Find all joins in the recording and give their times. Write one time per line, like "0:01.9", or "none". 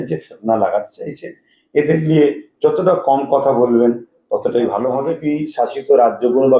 0:05.2